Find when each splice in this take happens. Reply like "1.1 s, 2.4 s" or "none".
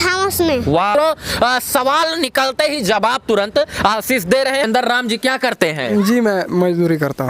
0.9 s, 4.6 s